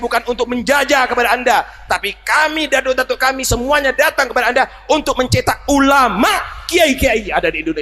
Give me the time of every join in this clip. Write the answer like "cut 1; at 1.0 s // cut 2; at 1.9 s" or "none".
none